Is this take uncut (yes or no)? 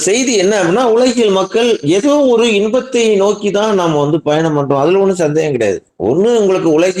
yes